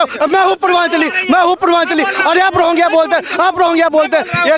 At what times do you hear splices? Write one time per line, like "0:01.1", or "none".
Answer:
none